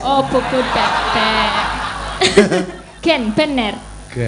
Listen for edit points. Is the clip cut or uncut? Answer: cut